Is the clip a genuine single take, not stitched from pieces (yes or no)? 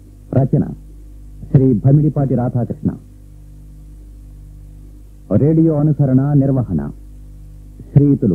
yes